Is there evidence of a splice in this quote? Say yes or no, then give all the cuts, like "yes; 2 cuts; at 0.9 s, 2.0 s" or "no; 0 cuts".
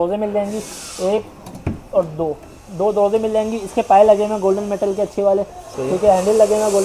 no; 0 cuts